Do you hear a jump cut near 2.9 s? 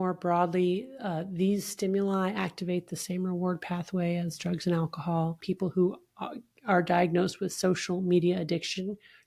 no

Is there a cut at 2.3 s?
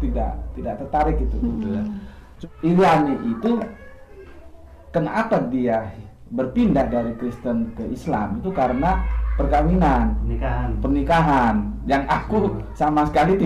yes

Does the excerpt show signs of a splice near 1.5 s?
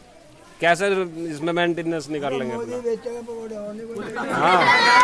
no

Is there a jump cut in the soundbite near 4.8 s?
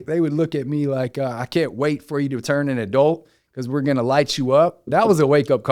yes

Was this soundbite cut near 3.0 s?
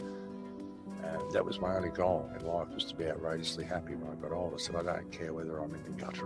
no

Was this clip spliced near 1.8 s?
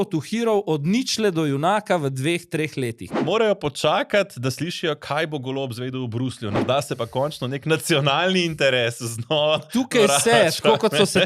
no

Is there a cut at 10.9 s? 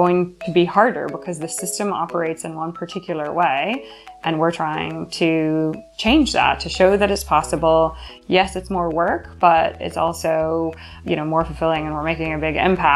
yes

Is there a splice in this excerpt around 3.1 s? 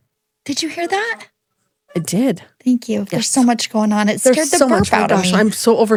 no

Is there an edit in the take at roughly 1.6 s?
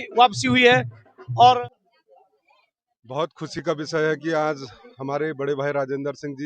yes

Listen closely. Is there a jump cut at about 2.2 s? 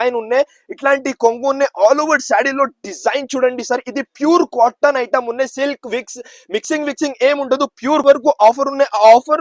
no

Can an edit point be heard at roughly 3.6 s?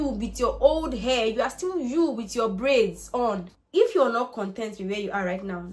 yes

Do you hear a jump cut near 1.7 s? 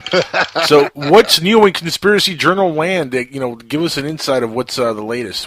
yes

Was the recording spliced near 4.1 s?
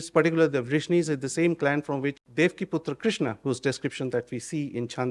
no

